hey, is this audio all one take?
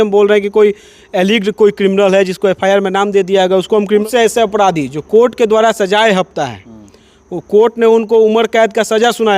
no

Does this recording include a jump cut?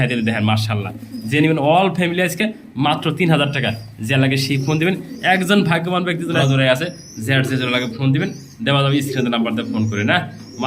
yes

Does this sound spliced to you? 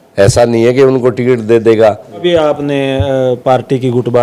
yes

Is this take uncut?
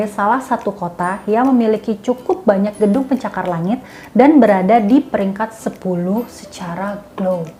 yes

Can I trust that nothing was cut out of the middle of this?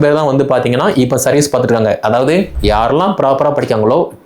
no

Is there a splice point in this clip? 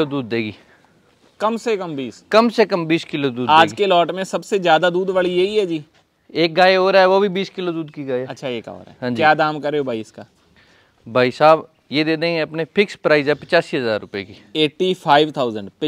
no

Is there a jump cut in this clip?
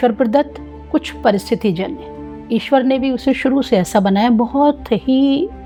no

